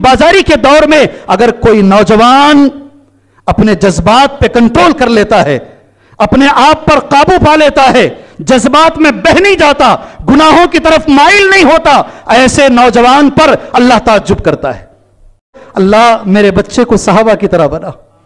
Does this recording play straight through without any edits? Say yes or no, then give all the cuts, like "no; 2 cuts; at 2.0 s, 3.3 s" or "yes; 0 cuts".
no; 1 cut; at 15.6 s